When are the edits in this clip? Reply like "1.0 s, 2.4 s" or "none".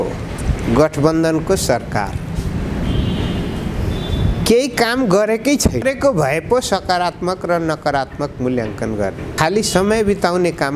5.8 s, 9.4 s

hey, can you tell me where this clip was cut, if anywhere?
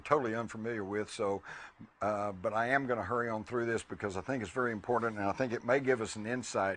4.7 s

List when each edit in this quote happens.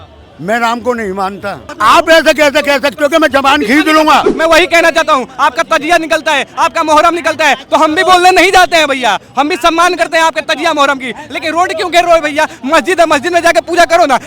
1.6 s, 4.3 s

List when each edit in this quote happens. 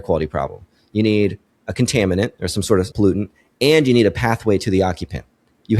2.9 s

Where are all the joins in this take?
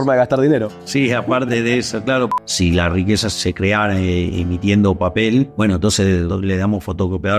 2.3 s, 3.3 s, 6.0 s

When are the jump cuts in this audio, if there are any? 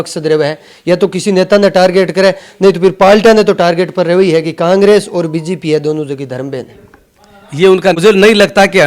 8.0 s

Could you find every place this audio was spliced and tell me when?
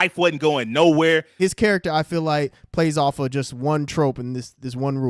1.4 s

